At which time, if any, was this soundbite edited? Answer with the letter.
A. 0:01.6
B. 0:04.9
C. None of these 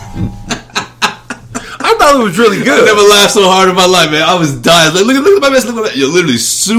C